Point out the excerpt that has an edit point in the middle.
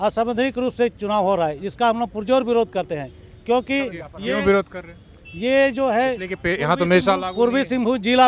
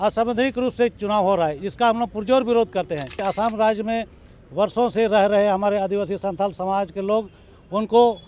second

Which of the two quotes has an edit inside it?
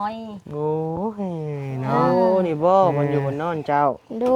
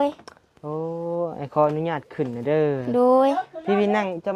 first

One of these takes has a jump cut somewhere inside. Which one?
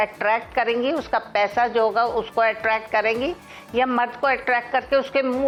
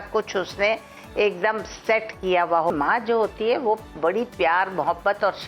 second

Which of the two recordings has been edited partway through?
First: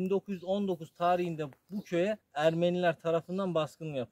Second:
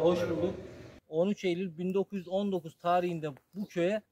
second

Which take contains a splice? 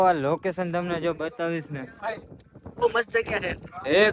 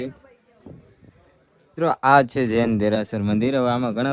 second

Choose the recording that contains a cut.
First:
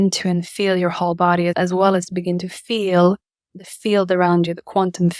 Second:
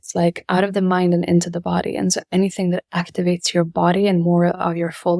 first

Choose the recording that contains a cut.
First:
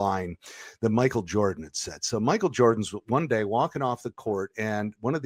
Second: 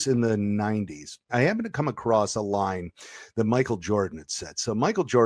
second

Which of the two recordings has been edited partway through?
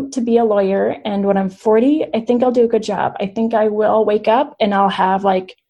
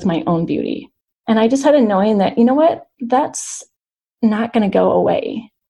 second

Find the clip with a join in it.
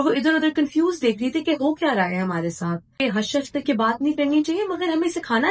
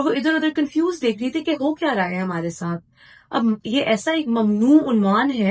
first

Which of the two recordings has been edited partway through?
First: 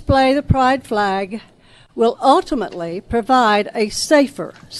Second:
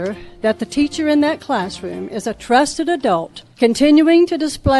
second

